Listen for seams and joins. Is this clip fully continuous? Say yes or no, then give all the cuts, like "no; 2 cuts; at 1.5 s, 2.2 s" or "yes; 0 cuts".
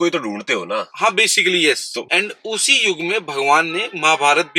no; 1 cut; at 2.0 s